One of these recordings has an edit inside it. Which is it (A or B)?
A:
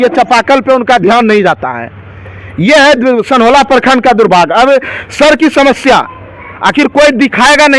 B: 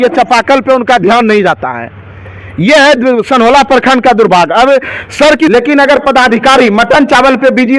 B